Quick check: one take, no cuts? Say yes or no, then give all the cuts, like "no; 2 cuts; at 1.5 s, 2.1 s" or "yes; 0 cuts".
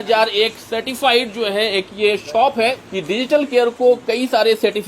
no; 1 cut; at 2.8 s